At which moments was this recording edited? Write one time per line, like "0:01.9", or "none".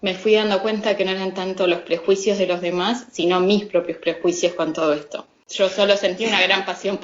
0:05.6